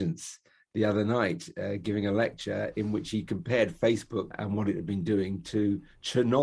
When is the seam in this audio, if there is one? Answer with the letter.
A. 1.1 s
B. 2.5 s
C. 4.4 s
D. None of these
C